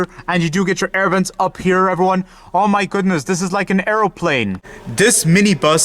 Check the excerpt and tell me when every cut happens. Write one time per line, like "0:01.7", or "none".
0:04.5